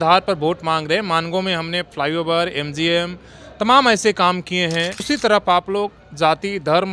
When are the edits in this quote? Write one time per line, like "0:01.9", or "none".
0:05.0